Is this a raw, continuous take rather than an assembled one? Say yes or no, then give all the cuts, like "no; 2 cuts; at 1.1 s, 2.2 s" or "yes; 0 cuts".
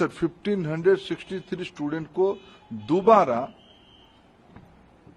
yes; 0 cuts